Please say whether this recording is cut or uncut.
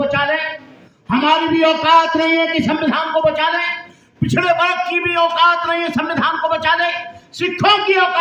uncut